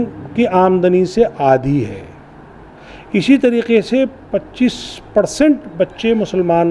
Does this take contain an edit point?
no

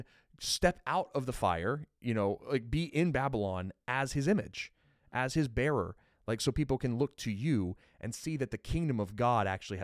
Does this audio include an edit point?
no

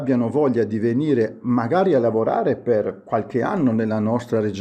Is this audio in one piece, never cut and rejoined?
yes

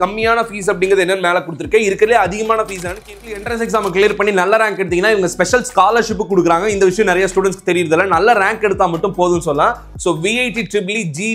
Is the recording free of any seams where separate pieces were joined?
no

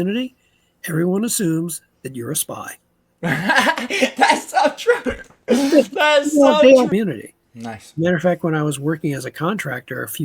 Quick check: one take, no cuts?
no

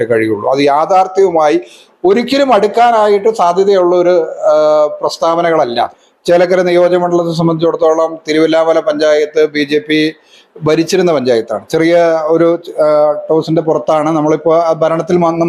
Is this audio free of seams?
no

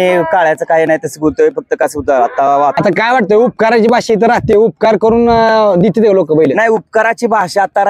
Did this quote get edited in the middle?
yes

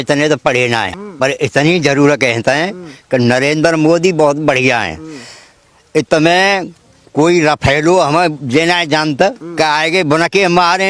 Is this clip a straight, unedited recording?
no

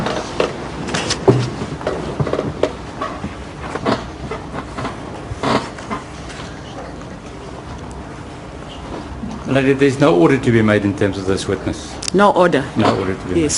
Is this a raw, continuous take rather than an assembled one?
no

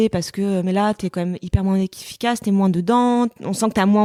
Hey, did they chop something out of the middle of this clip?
no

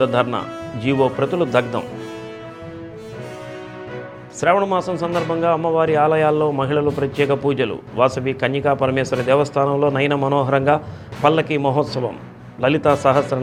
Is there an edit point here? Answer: no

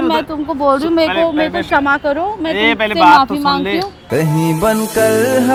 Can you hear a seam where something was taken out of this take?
no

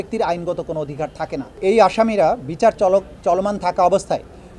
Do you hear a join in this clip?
yes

